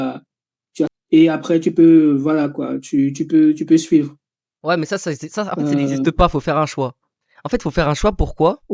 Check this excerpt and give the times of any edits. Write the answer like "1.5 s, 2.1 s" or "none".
0.9 s